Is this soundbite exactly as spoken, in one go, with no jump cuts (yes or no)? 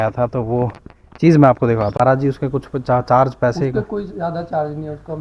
no